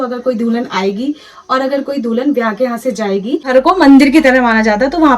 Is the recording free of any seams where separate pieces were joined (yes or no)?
no